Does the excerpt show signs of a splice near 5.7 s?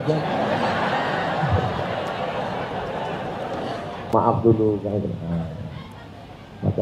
no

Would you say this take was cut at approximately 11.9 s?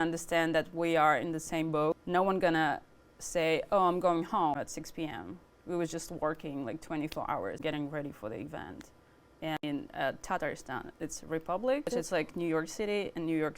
yes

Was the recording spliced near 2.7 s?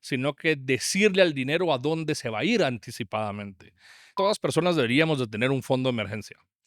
no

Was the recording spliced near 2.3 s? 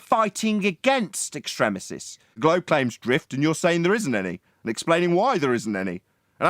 yes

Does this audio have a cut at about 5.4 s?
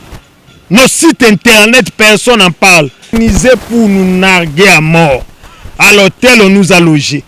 no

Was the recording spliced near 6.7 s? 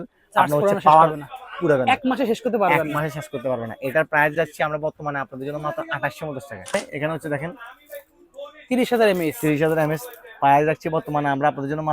yes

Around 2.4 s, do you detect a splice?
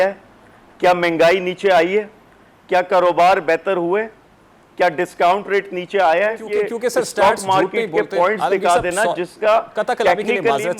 no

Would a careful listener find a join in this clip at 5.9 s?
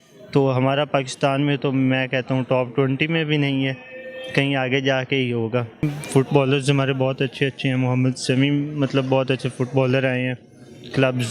yes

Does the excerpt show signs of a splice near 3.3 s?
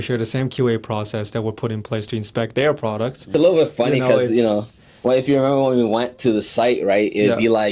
yes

